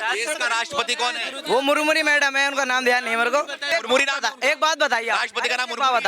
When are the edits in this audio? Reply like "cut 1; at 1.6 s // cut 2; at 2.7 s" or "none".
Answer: cut 1; at 3.7 s